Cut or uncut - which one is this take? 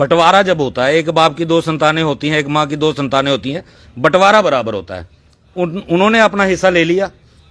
uncut